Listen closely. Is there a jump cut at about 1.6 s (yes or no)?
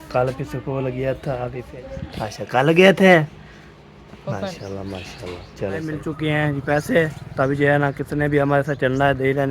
yes